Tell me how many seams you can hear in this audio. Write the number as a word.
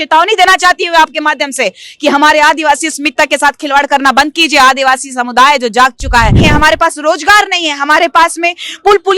one